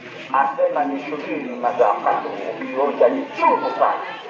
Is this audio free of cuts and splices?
yes; 0 cuts

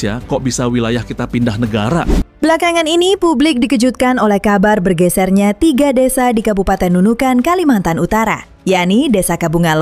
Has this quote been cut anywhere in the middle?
yes; 1 cut; at 2.3 s

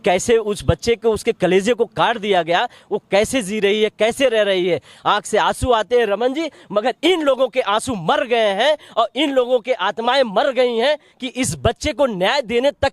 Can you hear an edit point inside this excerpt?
no; 0 cuts

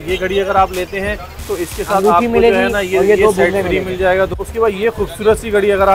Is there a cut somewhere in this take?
yes; 1 cut; at 4.3 s

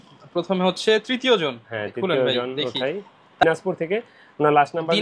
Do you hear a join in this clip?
yes; 1 cut; at 3.4 s

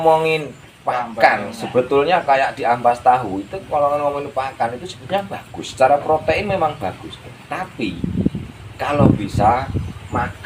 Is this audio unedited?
yes; 0 cuts

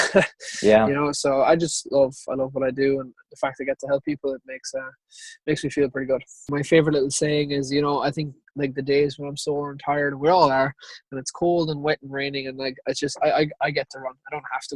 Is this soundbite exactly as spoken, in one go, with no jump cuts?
no; 1 cut; at 6.5 s

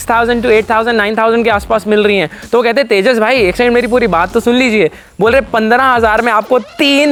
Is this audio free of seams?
yes; 0 cuts

